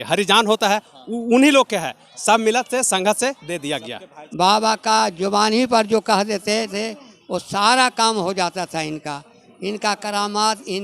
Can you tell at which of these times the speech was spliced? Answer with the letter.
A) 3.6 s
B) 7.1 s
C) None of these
A